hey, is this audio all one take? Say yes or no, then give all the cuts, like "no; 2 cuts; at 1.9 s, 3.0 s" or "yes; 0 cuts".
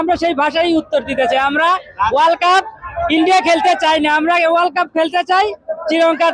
yes; 0 cuts